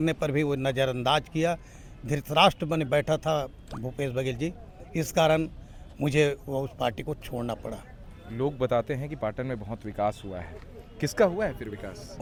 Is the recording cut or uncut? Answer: uncut